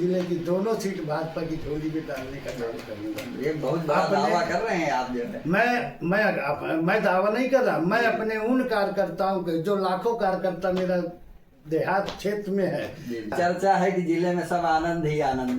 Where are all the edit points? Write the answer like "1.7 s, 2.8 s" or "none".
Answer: 13.3 s

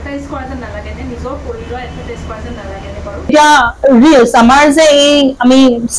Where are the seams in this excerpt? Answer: 3.3 s

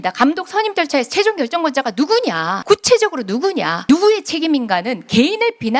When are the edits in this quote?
2.5 s, 3.7 s

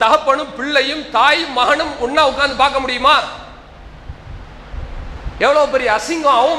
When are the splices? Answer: none

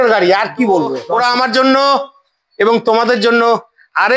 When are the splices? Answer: 1.0 s

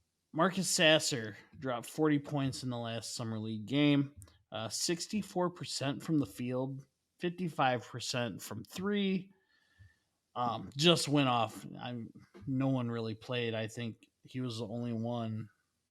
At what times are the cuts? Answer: none

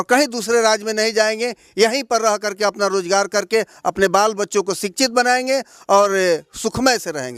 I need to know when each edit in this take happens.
none

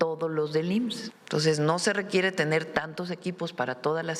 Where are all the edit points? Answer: 1.1 s

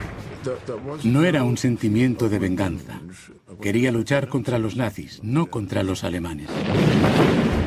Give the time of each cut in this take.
3.0 s

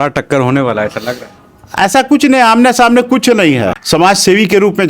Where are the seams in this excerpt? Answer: 3.8 s

